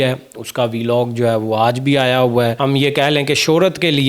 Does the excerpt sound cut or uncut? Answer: cut